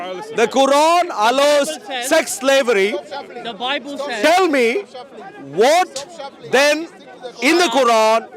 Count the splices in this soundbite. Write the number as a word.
zero